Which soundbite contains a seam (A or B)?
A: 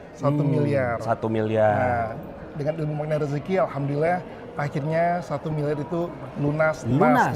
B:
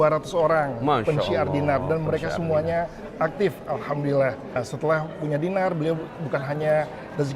B